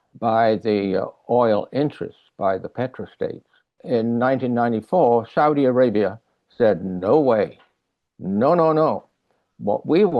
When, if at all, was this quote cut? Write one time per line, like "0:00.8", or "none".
0:03.7